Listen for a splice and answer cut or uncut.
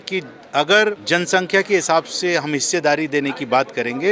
cut